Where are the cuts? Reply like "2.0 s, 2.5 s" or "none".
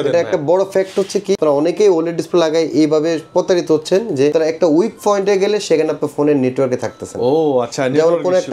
1.4 s, 4.3 s